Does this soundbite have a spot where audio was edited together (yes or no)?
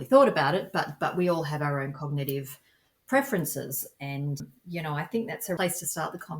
yes